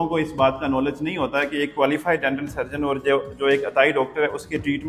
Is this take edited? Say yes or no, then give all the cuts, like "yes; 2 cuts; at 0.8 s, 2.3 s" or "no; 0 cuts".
no; 0 cuts